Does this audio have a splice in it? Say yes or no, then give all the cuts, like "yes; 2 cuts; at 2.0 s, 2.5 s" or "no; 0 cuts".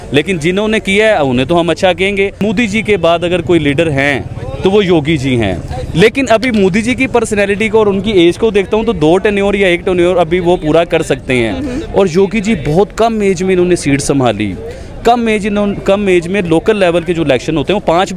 yes; 1 cut; at 2.4 s